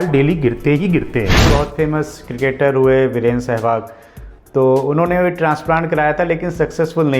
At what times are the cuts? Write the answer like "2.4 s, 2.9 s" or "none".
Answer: 1.5 s